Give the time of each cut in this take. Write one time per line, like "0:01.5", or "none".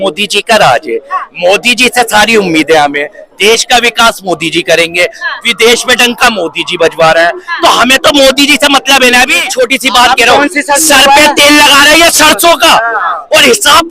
0:09.5